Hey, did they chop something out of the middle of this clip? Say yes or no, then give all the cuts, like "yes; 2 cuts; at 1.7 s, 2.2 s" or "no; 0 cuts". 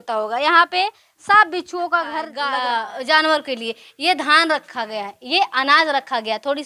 yes; 1 cut; at 2.4 s